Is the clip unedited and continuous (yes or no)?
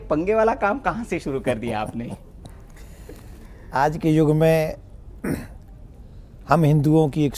yes